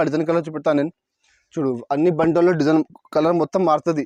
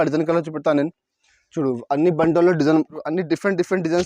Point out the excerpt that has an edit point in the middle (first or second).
second